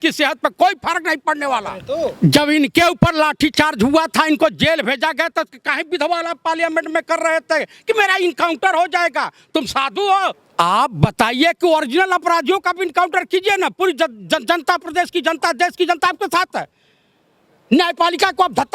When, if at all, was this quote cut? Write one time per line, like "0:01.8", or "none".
0:01.8
0:10.4